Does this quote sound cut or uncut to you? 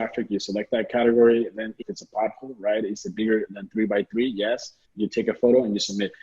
cut